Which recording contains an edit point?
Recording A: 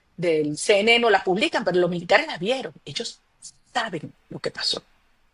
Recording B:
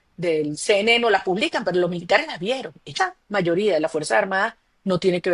B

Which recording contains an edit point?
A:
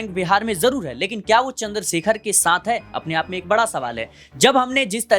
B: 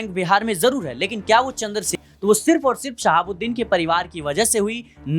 B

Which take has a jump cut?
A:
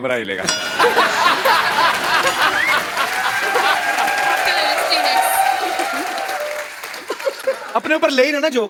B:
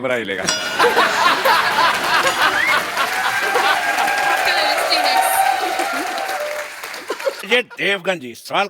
B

